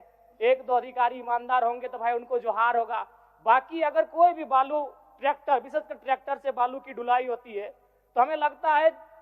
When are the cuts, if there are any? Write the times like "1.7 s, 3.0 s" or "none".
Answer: none